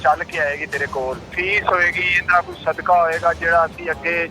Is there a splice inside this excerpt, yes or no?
yes